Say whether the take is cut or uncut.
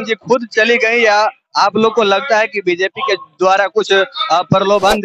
uncut